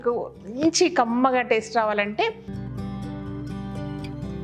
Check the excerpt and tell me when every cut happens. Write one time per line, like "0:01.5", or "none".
0:02.5